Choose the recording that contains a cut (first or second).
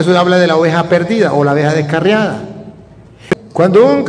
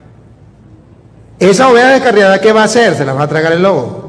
first